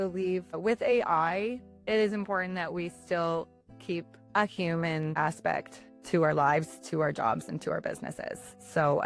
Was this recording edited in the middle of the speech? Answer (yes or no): no